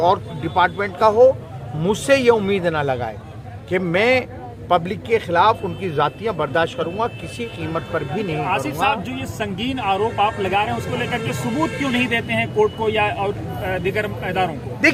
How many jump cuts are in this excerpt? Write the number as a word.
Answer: zero